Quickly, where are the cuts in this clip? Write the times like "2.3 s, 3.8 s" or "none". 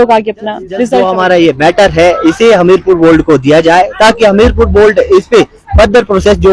1.0 s

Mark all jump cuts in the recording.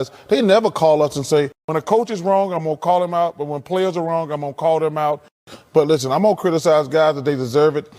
none

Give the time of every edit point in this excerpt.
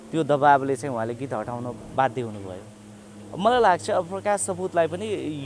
none

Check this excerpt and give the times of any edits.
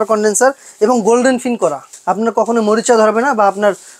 1.9 s

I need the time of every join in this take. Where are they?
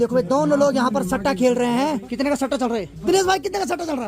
2.0 s, 2.9 s

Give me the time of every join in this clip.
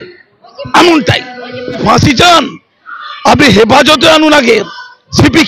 1.8 s

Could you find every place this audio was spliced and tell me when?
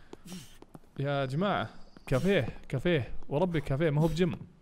none

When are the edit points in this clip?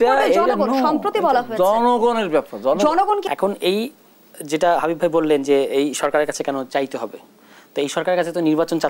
3.3 s

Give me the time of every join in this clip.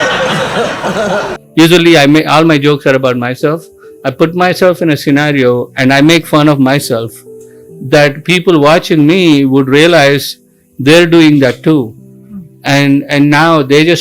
1.3 s

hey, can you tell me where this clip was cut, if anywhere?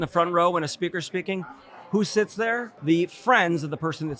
2.7 s

